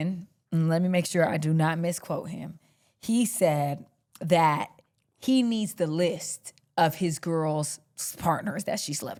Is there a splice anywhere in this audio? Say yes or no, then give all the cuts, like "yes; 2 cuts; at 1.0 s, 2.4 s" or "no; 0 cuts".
no; 0 cuts